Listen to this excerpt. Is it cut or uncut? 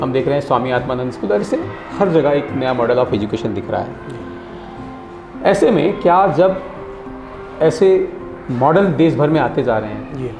uncut